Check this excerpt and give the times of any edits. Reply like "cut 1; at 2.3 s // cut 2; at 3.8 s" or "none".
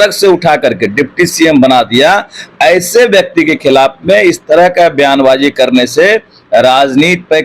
none